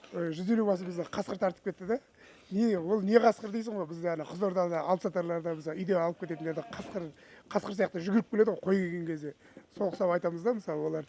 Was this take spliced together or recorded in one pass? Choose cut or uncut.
uncut